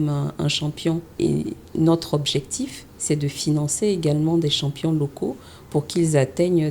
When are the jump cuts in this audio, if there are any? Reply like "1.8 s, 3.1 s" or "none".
1.1 s